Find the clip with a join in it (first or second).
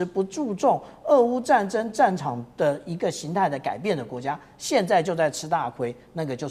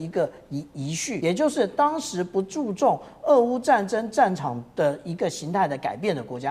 second